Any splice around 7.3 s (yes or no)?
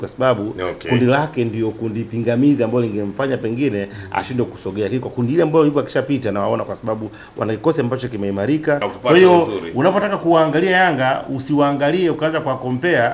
no